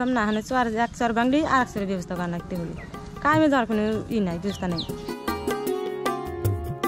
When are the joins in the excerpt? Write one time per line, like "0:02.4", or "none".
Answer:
none